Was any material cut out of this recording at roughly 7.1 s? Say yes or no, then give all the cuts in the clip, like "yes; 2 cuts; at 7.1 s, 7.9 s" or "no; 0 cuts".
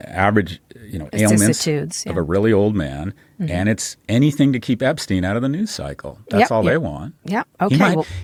no; 0 cuts